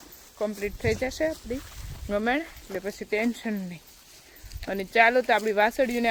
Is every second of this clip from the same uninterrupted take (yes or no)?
yes